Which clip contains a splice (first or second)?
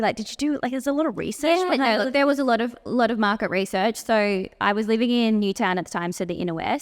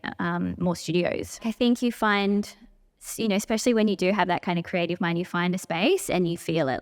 second